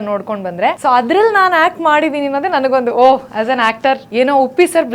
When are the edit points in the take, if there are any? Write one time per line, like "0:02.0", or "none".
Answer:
0:00.8
0:04.0

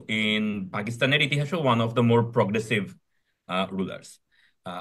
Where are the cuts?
none

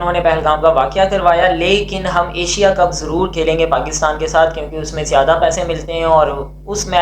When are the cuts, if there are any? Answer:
none

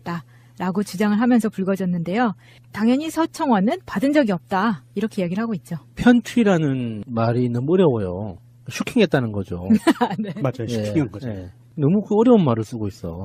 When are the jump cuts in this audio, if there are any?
none

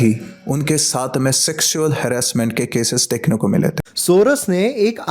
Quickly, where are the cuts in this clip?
0:03.9

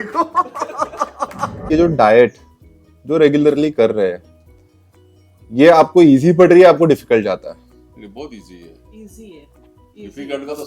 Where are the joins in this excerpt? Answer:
0:01.7

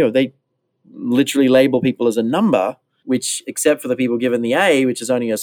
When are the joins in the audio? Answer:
0:02.9

